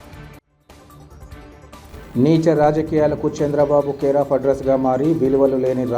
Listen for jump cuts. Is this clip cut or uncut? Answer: cut